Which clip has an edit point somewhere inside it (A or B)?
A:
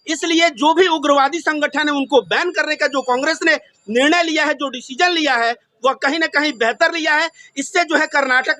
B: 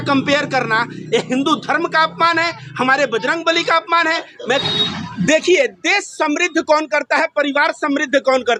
B